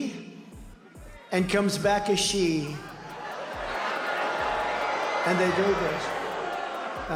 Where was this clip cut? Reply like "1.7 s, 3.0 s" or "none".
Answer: none